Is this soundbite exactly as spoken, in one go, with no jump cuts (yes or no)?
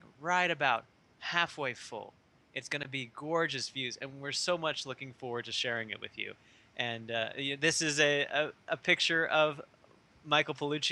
no